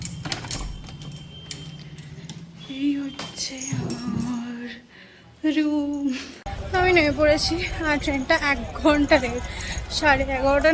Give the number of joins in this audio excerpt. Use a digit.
1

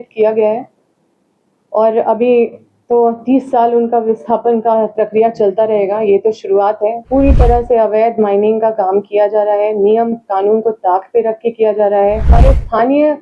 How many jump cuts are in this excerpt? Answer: 2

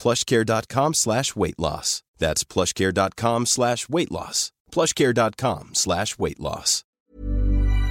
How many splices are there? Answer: 1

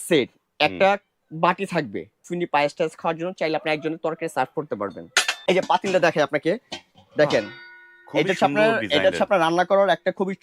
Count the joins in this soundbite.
2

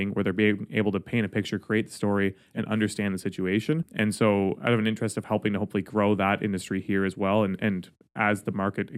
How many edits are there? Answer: 1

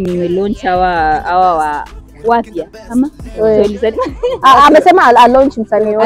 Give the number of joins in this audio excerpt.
0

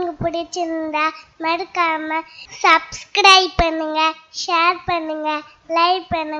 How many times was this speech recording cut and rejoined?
0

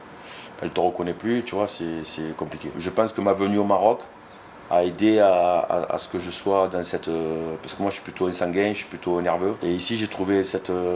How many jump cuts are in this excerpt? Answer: 2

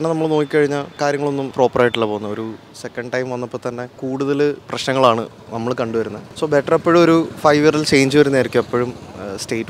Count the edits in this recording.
3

